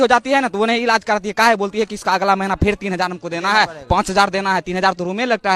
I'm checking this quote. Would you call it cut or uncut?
uncut